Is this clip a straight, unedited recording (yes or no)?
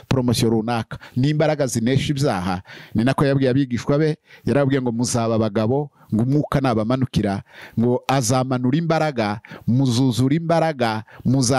yes